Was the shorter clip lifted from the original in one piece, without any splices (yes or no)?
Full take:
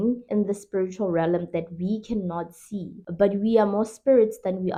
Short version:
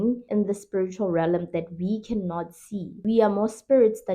no